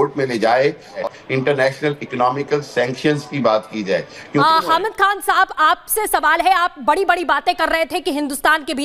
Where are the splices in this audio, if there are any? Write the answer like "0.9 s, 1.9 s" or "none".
1.0 s, 4.4 s